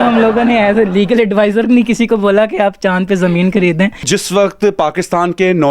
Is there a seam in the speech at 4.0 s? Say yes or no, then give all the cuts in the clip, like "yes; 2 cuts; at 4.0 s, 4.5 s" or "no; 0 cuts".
yes; 1 cut; at 4.0 s